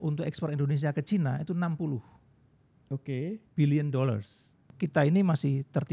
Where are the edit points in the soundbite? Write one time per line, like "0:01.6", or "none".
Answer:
0:04.7

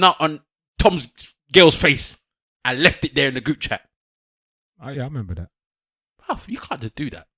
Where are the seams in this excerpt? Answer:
none

